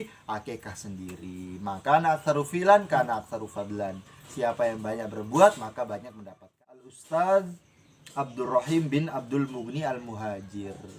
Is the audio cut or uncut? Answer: cut